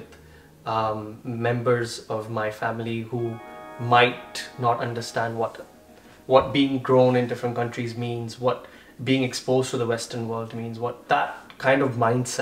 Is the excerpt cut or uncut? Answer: cut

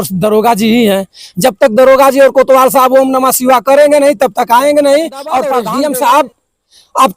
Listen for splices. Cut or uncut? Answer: cut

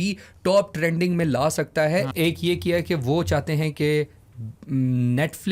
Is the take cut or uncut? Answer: cut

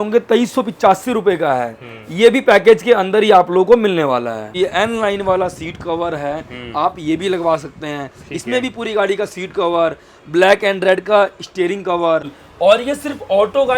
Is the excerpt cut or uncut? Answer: cut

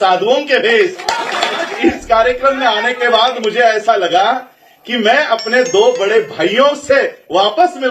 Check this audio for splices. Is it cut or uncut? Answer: cut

